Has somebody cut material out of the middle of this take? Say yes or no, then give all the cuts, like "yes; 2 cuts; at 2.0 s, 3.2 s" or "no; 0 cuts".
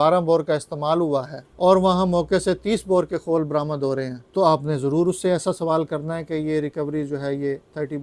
yes; 2 cuts; at 1.4 s, 4.2 s